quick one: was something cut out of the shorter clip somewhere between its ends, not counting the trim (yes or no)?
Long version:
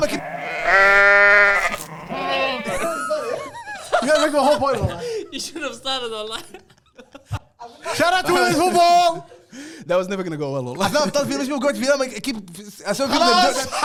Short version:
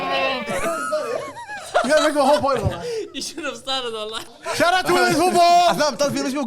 yes